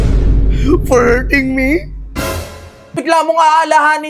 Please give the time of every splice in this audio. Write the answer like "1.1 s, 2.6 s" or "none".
3.0 s

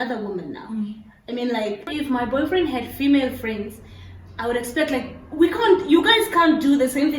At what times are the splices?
1.9 s

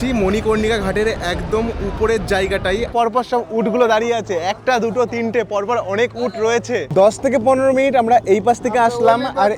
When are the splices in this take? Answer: 2.9 s, 6.9 s

